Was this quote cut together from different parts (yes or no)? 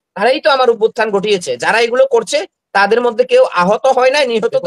no